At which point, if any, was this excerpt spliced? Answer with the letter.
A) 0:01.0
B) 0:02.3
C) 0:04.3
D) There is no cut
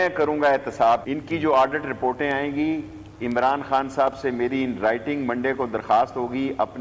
A